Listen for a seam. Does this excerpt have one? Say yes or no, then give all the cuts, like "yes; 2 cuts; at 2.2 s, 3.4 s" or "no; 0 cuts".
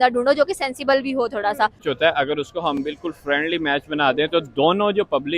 yes; 1 cut; at 1.8 s